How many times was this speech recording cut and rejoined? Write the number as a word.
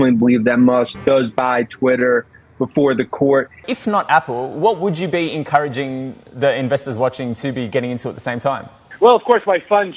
one